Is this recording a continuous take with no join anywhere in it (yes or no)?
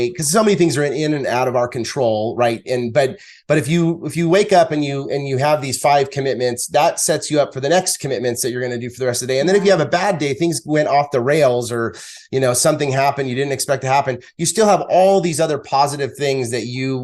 yes